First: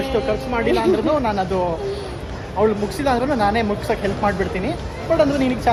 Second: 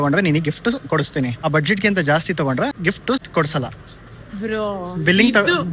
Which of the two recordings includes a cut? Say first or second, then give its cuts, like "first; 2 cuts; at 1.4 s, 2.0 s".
second; 2 cuts; at 1.4 s, 2.9 s